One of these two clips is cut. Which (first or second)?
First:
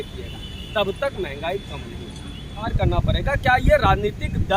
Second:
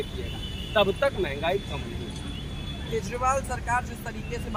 first